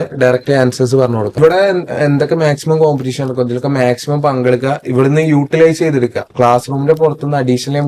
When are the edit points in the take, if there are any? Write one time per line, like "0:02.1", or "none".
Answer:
0:01.3
0:06.2